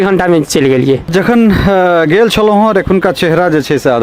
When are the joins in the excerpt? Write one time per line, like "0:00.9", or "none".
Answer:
0:01.1